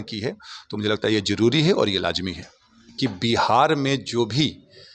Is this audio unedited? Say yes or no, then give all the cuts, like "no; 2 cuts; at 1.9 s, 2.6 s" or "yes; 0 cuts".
no; 1 cut; at 2.9 s